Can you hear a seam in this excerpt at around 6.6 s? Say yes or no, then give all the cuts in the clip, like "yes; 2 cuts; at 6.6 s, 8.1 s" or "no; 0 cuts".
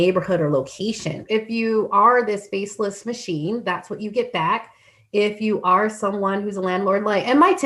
no; 1 cut; at 1.2 s